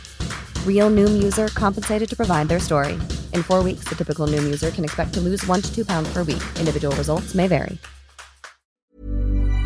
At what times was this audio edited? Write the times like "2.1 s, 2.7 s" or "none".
8.8 s